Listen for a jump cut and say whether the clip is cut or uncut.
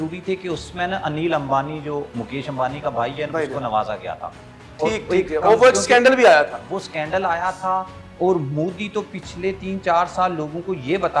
uncut